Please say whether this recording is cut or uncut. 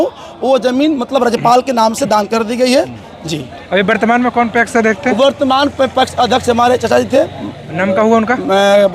uncut